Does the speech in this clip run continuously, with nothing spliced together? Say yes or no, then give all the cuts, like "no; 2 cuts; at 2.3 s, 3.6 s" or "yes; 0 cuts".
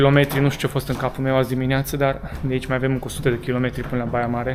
yes; 0 cuts